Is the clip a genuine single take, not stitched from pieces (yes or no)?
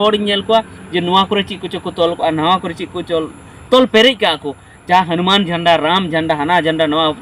yes